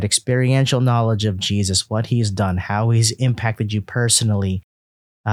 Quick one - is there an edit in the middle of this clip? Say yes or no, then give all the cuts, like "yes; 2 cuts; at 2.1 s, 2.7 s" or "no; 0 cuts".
yes; 1 cut; at 1.8 s